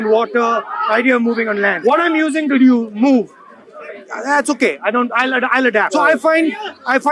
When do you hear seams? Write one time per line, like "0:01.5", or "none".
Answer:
0:01.8
0:05.8